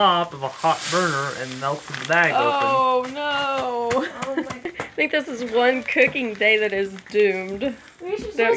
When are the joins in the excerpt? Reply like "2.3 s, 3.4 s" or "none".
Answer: 4.7 s